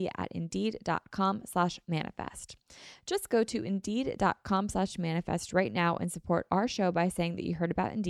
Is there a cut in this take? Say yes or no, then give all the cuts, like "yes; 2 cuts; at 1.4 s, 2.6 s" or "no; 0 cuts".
no; 0 cuts